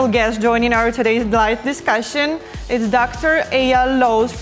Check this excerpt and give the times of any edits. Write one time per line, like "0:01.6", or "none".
none